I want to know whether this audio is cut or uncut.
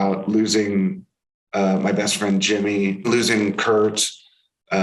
cut